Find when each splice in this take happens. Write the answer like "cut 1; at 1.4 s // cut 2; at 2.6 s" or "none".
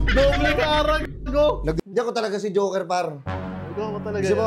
cut 1; at 1.8 s

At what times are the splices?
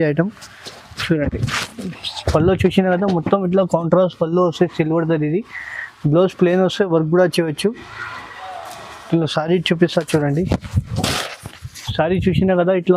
none

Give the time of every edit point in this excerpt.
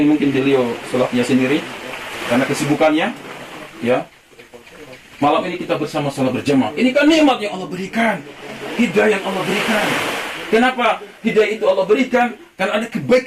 none

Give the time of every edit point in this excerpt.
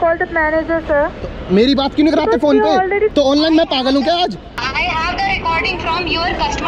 cut 1; at 3.1 s // cut 2; at 4.5 s

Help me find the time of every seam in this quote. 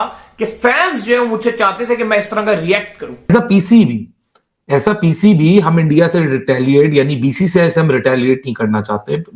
cut 1; at 3.3 s

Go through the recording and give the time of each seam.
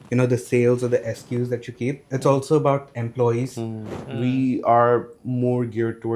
cut 1; at 3.9 s

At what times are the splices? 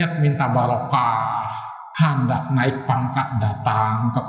none

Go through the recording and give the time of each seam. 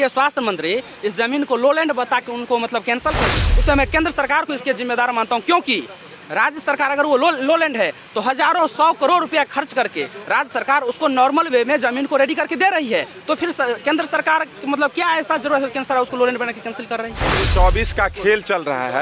cut 1; at 3.4 s // cut 2; at 17.4 s

